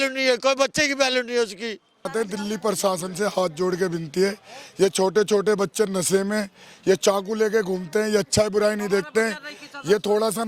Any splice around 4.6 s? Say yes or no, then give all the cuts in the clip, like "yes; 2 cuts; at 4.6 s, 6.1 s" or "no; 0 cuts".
no; 1 cut; at 2.1 s